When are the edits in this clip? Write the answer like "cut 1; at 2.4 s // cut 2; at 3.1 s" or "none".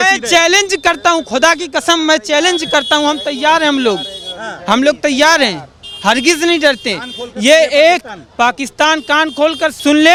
none